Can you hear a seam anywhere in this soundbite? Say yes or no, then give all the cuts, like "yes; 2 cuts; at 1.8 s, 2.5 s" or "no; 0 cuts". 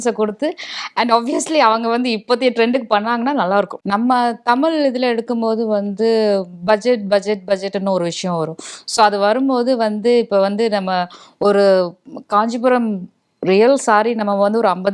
yes; 1 cut; at 3.8 s